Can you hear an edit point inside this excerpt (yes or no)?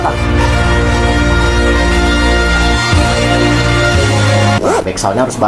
no